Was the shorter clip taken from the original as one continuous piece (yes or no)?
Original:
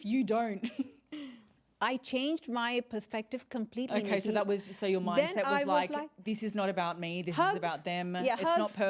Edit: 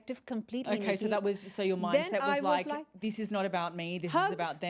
yes